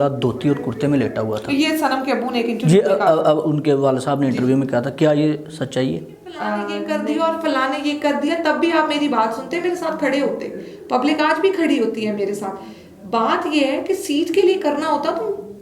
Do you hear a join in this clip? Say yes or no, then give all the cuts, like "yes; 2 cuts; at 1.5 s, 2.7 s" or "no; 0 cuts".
yes; 1 cut; at 6.8 s